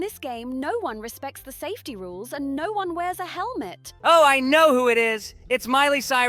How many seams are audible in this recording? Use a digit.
1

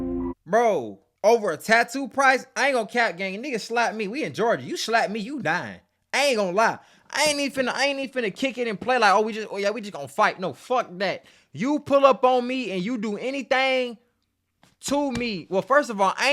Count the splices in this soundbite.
1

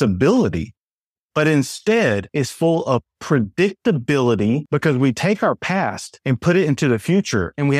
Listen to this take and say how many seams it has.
0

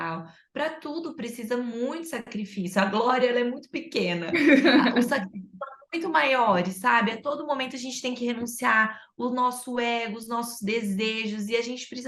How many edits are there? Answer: 0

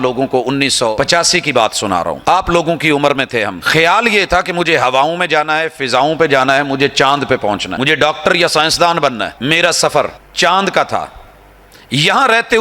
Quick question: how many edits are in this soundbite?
6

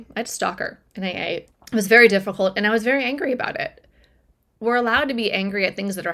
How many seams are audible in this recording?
2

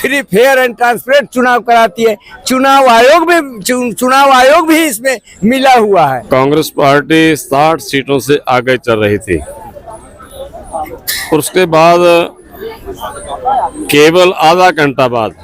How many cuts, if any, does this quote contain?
1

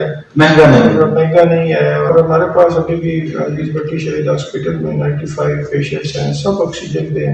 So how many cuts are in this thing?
1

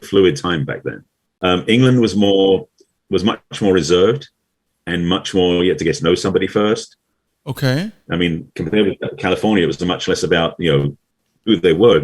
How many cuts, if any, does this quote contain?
2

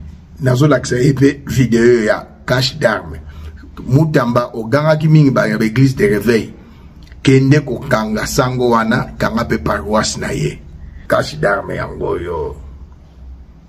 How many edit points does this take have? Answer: 1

